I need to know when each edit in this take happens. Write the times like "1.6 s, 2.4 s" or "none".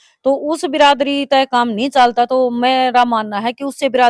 none